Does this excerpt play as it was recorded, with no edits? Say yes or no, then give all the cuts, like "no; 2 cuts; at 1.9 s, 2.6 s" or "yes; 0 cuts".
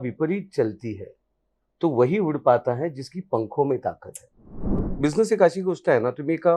no; 1 cut; at 4.8 s